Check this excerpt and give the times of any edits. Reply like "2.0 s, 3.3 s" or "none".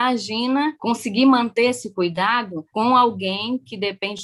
none